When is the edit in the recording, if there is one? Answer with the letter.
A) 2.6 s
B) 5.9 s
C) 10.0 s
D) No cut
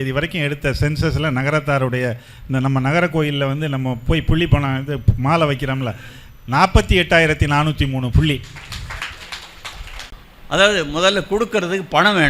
C